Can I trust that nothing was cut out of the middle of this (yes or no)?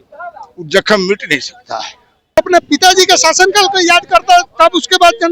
no